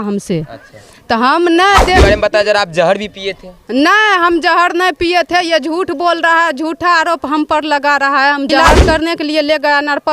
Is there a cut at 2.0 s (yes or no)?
yes